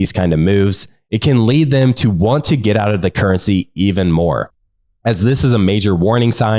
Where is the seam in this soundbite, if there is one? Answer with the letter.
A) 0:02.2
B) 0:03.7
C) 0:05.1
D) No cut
D